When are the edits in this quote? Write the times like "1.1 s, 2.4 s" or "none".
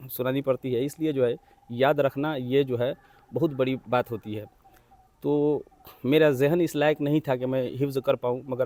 none